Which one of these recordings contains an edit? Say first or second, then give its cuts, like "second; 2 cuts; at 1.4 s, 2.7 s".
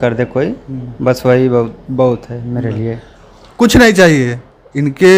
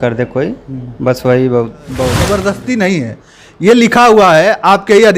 second; 1 cut; at 2.2 s